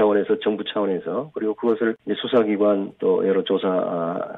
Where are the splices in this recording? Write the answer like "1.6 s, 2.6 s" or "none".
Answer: 2.0 s